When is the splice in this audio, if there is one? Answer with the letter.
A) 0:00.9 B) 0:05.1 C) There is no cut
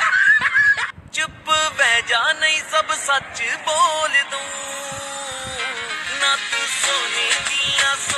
A